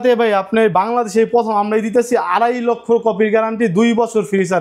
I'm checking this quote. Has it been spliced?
no; 0 cuts

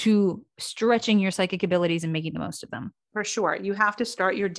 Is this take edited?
yes; 1 cut; at 3.0 s

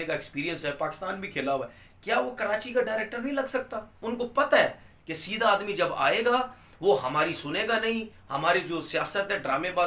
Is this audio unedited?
no; 1 cut; at 4.0 s

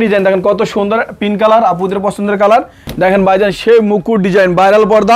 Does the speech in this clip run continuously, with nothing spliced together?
no; 1 cut; at 2.8 s

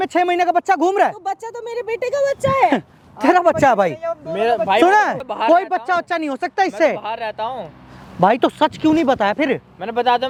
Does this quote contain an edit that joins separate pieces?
no; 0 cuts

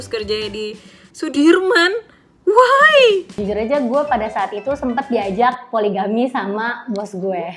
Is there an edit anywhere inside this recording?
yes; 1 cut; at 3.3 s

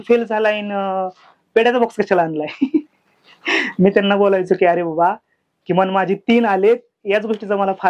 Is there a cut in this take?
no; 0 cuts

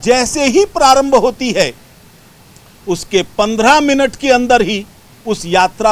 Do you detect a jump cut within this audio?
no; 0 cuts

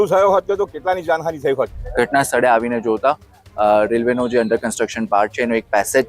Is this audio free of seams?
no; 1 cut; at 1.8 s

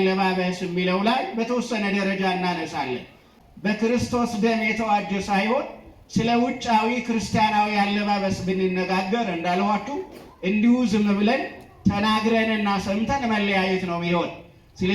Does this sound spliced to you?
yes; 1 cut; at 3.3 s

